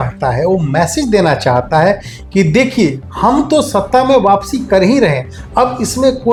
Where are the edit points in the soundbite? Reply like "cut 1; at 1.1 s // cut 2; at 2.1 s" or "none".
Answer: none